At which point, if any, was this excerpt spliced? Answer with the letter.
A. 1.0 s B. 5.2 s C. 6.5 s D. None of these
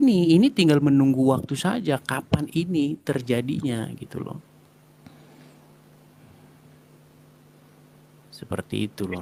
D